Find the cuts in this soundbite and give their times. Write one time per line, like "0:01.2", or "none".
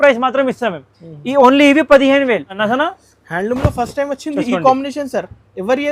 0:02.6